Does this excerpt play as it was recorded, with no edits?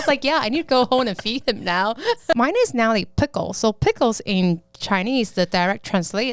no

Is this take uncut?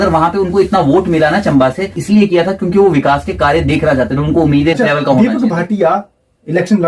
no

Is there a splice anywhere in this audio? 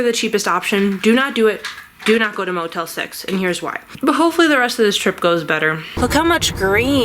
yes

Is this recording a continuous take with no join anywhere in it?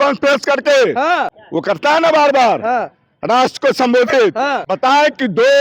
yes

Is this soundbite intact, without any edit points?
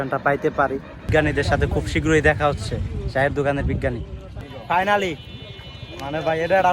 no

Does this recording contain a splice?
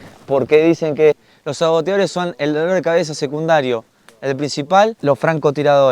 yes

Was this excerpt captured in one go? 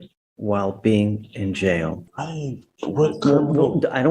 no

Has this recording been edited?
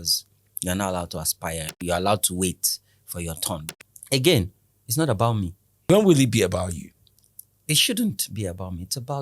yes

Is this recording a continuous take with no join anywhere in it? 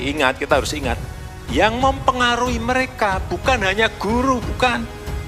yes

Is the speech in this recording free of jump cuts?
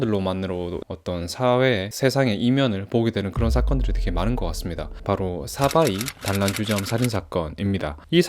no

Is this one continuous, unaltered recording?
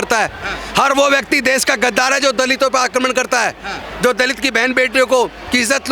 yes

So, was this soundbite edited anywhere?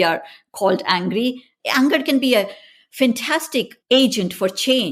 yes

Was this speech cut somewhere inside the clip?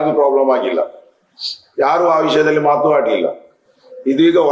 no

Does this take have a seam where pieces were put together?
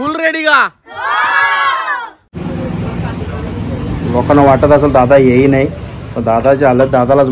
yes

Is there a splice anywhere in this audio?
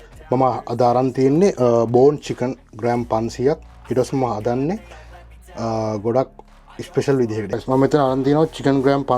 yes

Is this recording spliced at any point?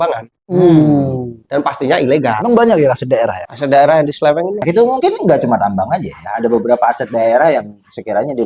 yes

